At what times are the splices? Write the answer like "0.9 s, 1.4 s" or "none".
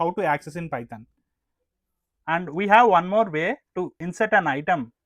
2.1 s, 4.0 s

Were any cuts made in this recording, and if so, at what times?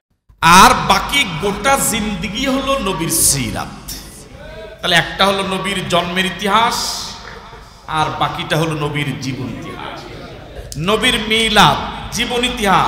10.6 s

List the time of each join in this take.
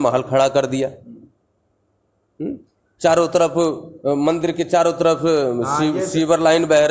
none

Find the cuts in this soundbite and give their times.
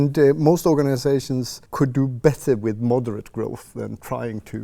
1.6 s

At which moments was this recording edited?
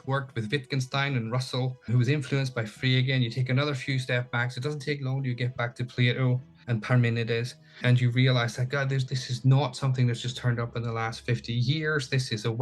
1.9 s, 6.5 s, 7.8 s, 9.1 s

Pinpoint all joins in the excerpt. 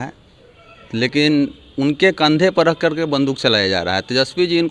none

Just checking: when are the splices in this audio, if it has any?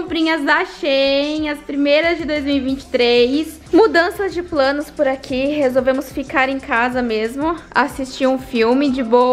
3.7 s

